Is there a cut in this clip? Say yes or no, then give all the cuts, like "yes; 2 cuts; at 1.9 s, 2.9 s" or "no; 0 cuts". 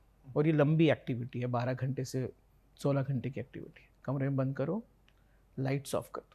no; 0 cuts